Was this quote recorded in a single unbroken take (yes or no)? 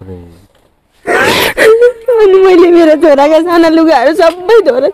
yes